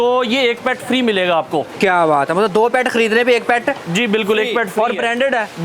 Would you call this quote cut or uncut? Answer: uncut